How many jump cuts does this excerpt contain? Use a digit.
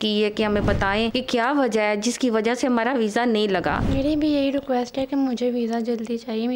2